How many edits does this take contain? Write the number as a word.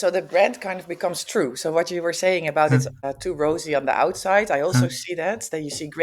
one